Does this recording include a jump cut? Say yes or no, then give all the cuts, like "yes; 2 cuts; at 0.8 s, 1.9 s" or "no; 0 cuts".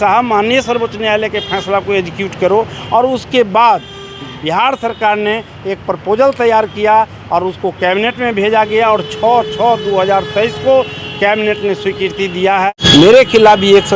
yes; 1 cut; at 12.8 s